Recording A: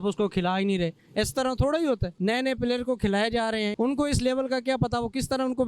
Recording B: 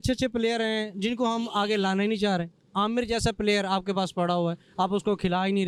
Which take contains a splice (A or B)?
A